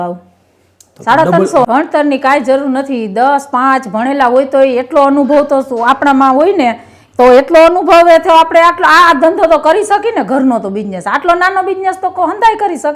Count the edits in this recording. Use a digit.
1